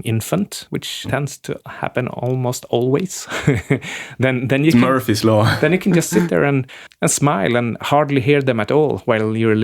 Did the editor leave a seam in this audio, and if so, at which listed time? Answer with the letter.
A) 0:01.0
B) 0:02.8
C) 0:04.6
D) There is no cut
A